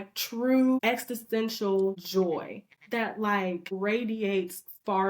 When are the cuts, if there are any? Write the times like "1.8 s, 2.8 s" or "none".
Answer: 0.8 s, 2.0 s, 3.8 s